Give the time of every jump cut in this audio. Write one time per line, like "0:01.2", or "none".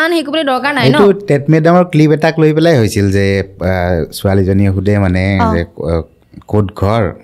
none